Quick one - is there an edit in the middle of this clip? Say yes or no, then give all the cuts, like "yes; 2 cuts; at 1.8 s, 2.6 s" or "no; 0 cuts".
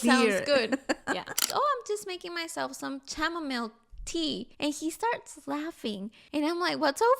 yes; 3 cuts; at 1.5 s, 4.5 s, 6.1 s